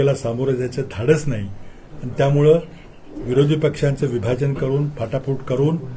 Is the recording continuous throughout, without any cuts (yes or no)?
yes